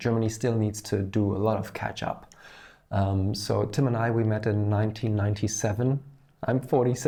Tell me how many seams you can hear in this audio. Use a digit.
0